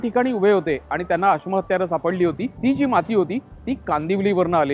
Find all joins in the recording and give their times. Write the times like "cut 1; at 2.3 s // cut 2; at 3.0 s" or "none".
cut 1; at 2.5 s